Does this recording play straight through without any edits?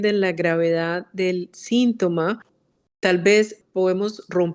no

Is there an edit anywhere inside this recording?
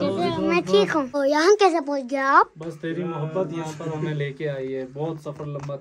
yes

